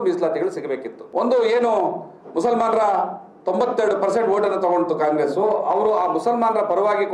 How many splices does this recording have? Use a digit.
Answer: 1